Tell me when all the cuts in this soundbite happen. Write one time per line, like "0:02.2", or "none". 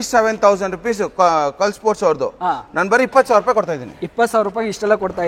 none